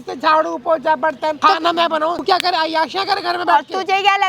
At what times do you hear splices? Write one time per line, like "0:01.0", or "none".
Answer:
0:01.4
0:02.2